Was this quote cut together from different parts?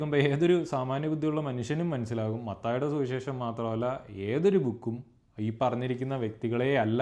no; 0 cuts

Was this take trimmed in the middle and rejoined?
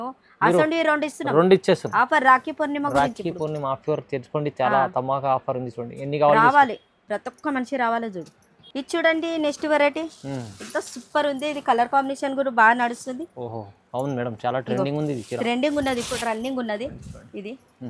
no; 0 cuts

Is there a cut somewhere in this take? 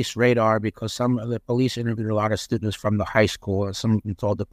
no; 0 cuts

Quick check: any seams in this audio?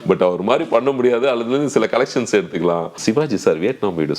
yes; 1 cut; at 2.9 s

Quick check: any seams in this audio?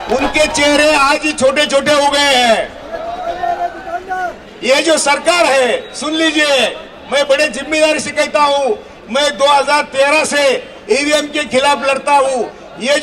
no; 0 cuts

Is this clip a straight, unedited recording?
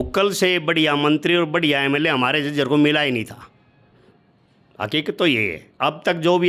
yes; 0 cuts

